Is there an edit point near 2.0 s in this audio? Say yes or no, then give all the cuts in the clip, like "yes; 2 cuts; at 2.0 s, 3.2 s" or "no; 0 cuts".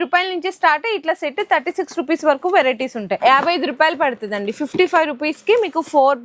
no; 1 cut; at 3.2 s